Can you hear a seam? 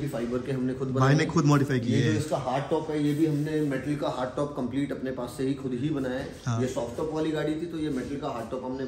no; 0 cuts

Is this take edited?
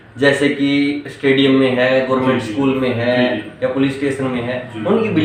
no; 0 cuts

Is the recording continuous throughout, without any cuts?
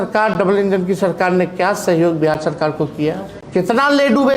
no; 1 cut; at 3.3 s

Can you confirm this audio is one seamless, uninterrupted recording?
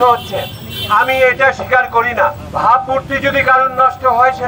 no; 1 cut; at 2.4 s

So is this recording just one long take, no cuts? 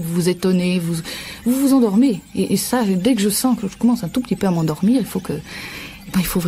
yes; 0 cuts

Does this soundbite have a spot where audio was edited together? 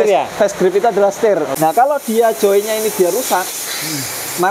yes; 1 cut; at 1.5 s

